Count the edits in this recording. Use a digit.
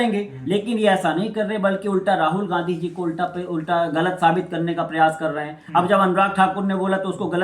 0